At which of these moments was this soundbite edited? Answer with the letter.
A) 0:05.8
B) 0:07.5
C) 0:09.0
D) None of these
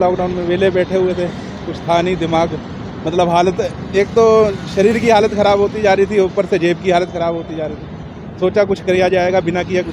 D